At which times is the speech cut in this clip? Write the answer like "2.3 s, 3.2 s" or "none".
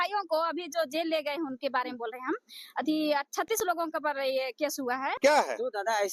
5.2 s

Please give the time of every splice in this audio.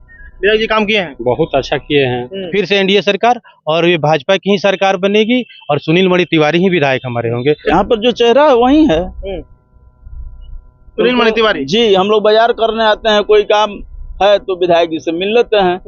2.5 s, 7.6 s

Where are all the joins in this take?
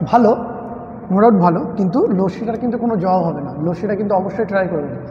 none

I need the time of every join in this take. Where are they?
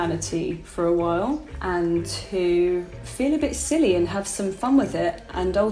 1.5 s, 3.0 s

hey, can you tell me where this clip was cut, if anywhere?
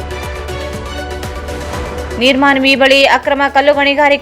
none

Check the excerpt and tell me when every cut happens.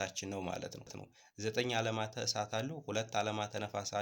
1.1 s

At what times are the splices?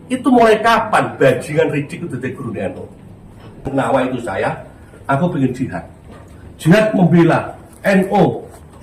3.7 s

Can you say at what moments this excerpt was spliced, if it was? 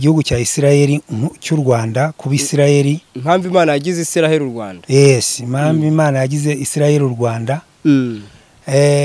none

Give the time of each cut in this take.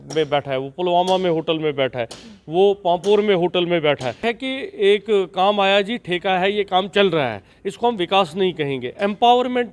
4.2 s

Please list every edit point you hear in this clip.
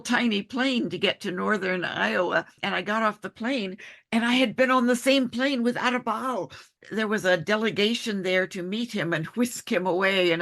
2.6 s, 6.8 s

